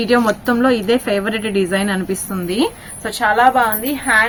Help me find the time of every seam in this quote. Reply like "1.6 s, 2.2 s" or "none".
none